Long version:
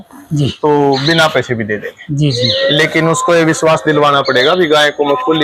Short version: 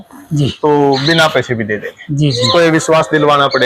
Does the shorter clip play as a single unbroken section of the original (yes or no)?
no